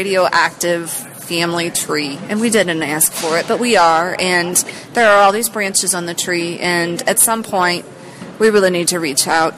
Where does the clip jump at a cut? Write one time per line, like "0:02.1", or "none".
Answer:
none